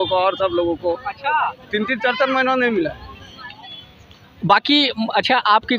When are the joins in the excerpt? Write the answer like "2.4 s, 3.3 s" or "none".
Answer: none